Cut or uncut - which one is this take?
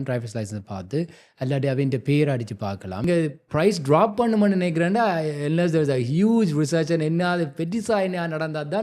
cut